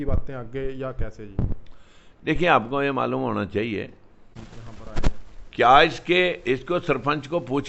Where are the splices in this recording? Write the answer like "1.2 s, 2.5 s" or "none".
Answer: 4.4 s